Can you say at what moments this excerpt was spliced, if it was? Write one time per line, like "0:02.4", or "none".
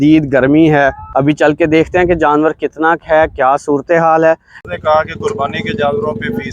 0:01.0
0:04.6